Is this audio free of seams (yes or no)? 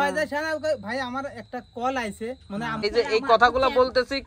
no